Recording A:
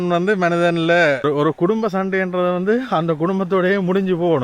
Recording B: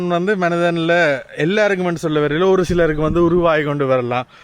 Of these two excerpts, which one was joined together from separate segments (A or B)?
A